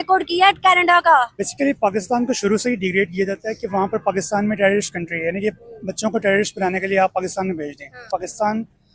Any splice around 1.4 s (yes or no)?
yes